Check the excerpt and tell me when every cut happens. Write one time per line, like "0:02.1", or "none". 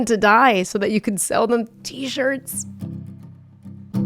0:02.7